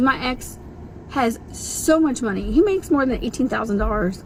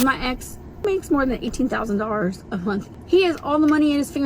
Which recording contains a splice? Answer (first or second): second